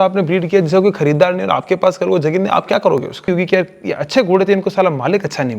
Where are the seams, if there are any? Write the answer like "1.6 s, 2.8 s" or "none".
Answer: 3.3 s